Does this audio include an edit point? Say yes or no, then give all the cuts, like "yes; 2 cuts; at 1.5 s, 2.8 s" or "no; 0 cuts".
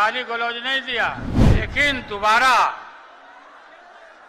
yes; 1 cut; at 1.4 s